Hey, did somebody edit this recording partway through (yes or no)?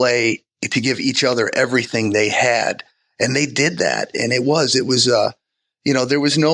no